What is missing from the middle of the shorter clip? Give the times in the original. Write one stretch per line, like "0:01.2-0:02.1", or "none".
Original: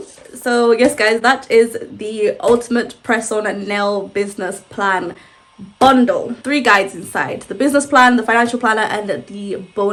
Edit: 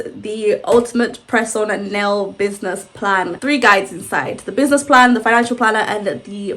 0:05.1-0:06.4